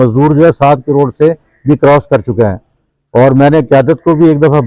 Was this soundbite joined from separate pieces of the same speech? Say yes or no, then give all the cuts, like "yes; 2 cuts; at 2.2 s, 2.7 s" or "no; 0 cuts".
no; 0 cuts